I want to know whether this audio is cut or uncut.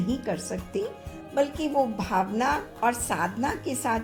uncut